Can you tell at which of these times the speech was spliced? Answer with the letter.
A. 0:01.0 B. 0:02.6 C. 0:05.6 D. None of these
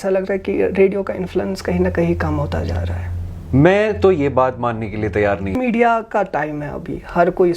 C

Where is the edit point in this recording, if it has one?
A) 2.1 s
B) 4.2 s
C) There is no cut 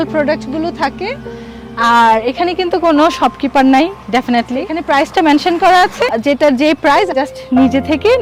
C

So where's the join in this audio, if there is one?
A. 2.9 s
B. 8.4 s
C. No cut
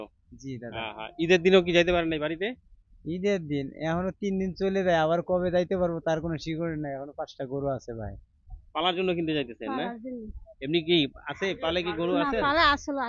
B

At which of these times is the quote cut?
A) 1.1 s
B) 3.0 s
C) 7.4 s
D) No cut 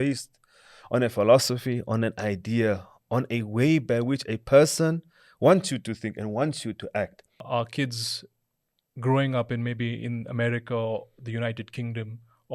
C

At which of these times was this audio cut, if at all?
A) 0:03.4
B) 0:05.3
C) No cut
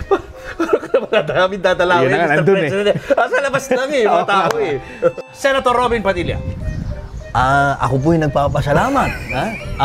B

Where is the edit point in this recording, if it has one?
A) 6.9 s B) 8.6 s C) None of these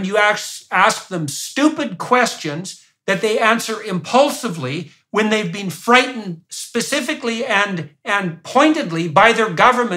A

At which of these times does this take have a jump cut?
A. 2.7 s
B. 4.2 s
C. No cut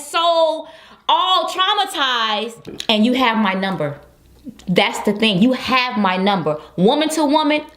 A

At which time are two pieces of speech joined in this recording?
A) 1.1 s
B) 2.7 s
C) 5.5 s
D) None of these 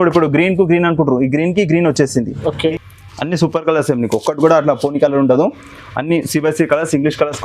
B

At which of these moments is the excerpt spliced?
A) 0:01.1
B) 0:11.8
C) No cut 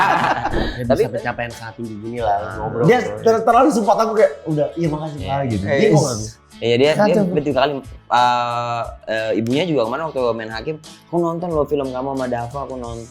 A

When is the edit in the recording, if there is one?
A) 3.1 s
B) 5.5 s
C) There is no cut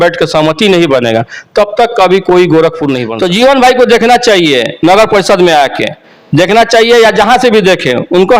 A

